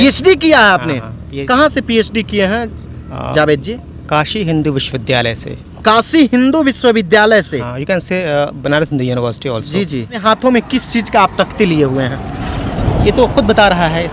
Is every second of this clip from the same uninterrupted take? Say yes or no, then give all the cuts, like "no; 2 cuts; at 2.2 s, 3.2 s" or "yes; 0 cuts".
no; 2 cuts; at 1.3 s, 10.2 s